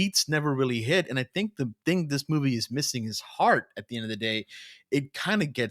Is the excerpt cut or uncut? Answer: uncut